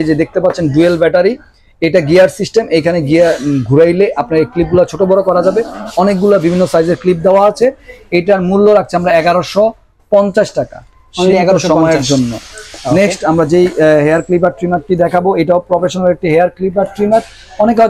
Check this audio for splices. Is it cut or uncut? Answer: uncut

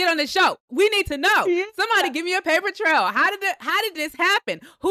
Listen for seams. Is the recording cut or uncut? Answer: uncut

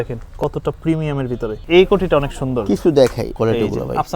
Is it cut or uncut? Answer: cut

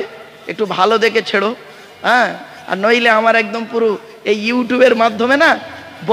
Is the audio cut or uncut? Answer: uncut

